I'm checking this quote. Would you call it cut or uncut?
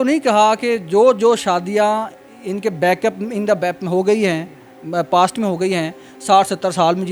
uncut